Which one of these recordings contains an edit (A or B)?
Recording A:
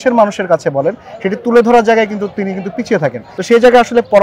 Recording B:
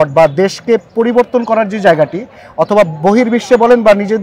A